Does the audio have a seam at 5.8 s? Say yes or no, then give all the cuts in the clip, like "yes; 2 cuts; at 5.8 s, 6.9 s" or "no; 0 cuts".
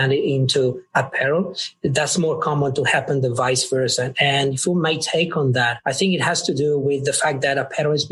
yes; 1 cut; at 5.8 s